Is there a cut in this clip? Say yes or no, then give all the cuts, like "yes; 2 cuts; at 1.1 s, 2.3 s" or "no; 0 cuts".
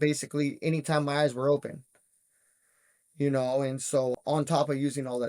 no; 0 cuts